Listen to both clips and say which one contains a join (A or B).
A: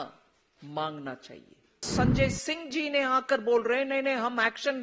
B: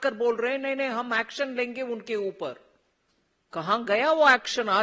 A